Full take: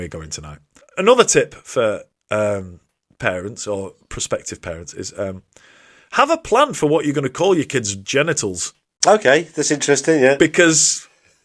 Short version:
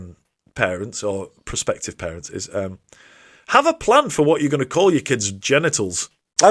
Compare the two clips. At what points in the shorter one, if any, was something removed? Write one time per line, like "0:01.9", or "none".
none